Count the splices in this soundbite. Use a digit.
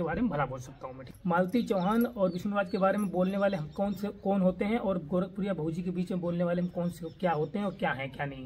1